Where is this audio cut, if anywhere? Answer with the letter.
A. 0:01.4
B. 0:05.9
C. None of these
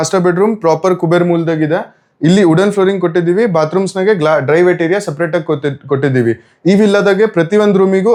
C